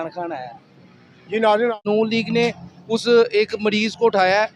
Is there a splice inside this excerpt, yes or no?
yes